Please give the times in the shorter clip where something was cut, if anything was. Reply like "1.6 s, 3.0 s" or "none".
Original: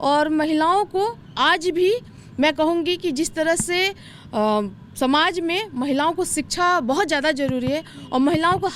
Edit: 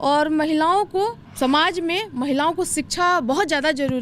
1.2 s